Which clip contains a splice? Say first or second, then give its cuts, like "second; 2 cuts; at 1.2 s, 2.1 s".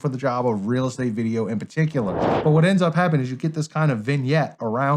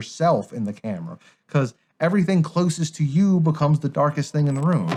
first; 1 cut; at 2.3 s